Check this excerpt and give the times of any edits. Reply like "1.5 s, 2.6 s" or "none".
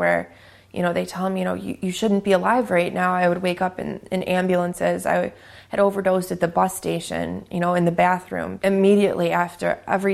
none